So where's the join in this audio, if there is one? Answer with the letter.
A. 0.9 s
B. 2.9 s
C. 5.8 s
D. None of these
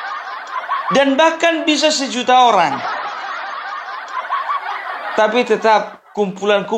D